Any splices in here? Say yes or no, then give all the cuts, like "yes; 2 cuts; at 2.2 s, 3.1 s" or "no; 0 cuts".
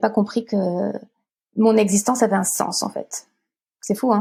no; 0 cuts